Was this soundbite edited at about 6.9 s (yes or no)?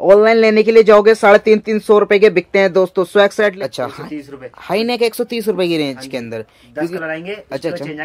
no